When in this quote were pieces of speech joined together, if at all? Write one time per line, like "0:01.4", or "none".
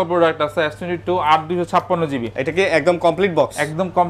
none